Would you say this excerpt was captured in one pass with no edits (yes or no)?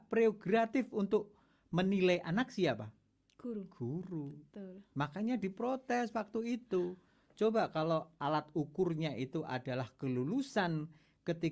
yes